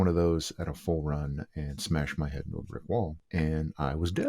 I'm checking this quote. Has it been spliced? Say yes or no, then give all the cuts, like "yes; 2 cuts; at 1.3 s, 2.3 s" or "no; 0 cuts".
yes; 1 cut; at 3.2 s